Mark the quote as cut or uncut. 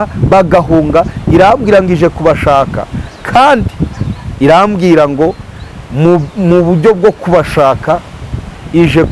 uncut